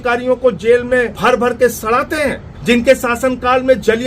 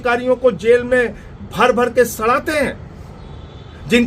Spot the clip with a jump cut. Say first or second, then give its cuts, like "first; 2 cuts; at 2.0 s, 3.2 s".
first; 2 cuts; at 1.1 s, 2.5 s